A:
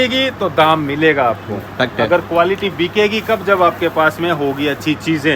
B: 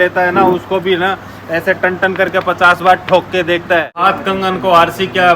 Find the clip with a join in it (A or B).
B